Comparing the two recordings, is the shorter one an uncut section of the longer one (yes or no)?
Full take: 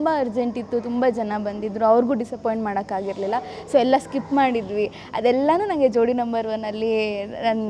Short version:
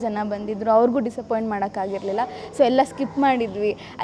yes